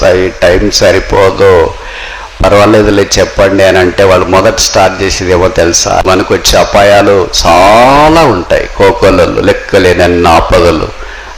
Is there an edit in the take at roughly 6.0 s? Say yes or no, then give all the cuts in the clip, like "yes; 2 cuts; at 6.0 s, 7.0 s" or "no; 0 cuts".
yes; 1 cut; at 6.0 s